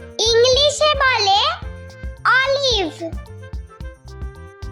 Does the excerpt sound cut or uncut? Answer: cut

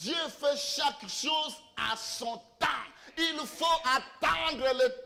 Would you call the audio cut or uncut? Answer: uncut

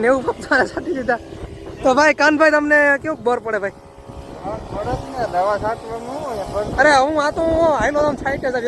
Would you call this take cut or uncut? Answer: uncut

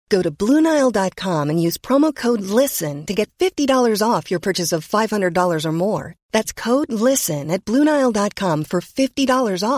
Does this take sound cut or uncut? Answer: uncut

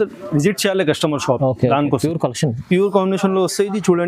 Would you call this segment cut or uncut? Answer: cut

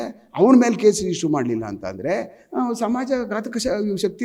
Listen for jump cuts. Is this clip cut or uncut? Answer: uncut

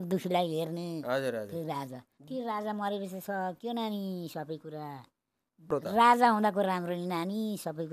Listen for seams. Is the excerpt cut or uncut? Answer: cut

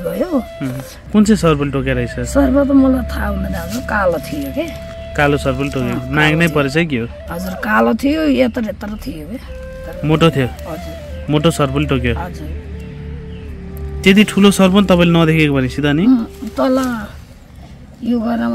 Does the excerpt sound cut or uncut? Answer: cut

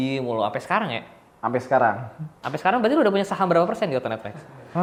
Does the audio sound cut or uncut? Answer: uncut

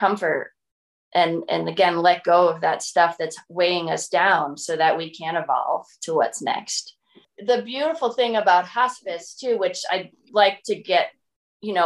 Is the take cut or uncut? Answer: cut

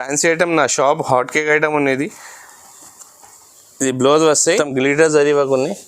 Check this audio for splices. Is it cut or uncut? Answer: cut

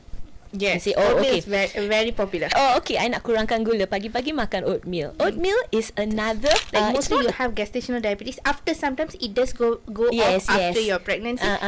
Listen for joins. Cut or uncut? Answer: cut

